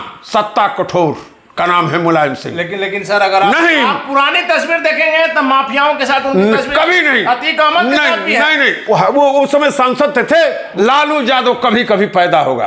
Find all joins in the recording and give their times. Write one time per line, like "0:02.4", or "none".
0:10.7